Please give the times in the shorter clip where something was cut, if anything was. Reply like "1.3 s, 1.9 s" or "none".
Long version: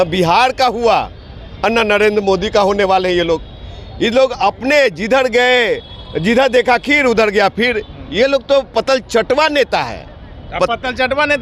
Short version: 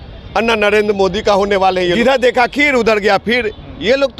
2.0 s